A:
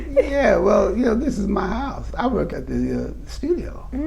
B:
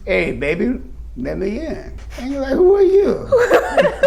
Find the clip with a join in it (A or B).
A